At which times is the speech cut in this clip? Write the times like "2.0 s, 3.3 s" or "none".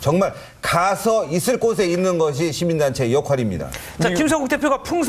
none